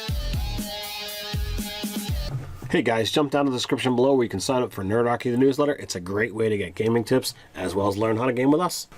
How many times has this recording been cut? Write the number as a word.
one